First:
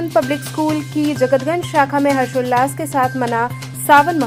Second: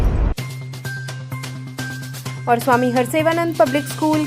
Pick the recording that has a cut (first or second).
second